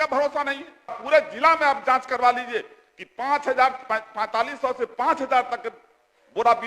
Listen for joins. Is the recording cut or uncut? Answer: cut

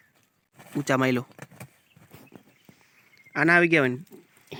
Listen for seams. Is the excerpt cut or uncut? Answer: uncut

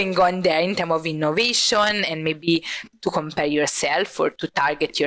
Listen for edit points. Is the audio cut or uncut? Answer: uncut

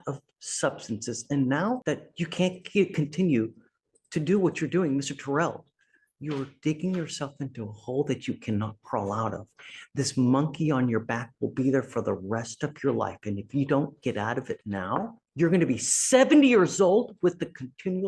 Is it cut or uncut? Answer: cut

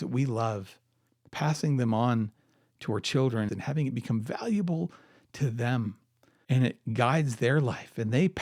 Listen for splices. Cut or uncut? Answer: cut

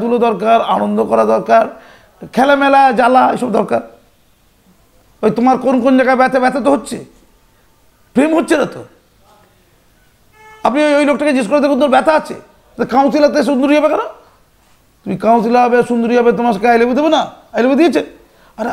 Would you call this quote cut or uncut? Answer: uncut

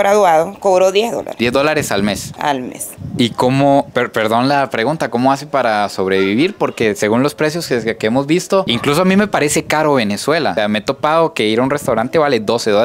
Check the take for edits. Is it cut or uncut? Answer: uncut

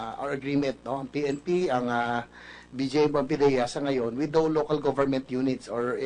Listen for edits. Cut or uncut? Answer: uncut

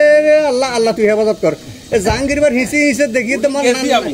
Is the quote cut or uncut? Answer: uncut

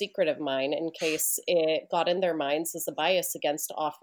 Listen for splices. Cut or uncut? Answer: uncut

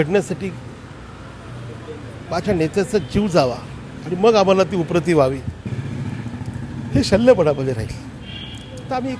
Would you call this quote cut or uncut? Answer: uncut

